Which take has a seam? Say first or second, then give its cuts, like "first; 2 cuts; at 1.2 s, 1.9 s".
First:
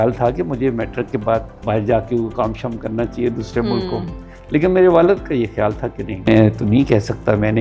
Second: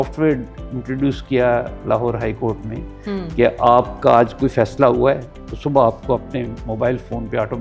first; 2 cuts; at 1.5 s, 6.3 s